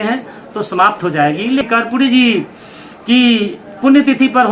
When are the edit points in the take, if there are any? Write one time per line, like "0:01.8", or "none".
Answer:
0:01.6